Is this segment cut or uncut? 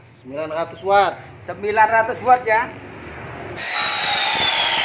cut